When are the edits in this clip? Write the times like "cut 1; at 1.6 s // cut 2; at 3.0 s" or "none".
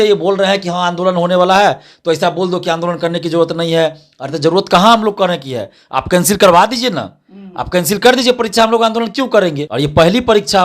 cut 1; at 9.6 s